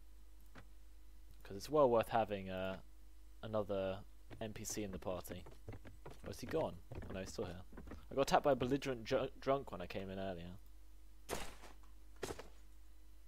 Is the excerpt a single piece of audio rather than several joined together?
no; 1 cut; at 9.6 s

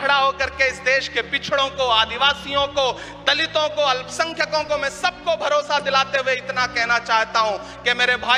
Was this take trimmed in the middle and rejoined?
no; 0 cuts

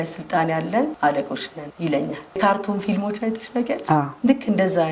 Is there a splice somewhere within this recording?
yes; 1 cut; at 2.4 s

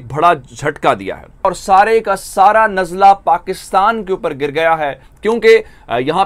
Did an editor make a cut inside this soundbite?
yes; 2 cuts; at 1.5 s, 5.1 s

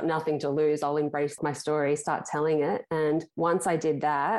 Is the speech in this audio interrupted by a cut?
yes; 2 cuts; at 1.4 s, 3.3 s

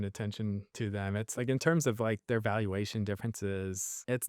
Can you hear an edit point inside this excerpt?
yes; 1 cut; at 1.3 s

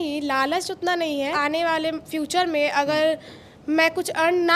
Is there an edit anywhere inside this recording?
yes; 1 cut; at 1.3 s

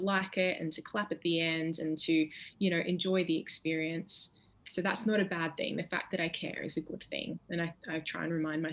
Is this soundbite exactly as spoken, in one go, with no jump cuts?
no; 1 cut; at 4.6 s

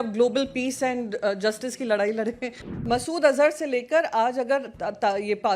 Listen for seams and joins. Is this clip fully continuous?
no; 1 cut; at 2.8 s

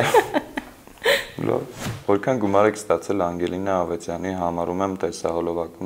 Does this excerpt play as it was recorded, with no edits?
no; 1 cut; at 1.8 s

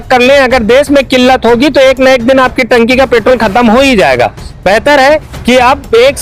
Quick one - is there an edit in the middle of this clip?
no; 0 cuts

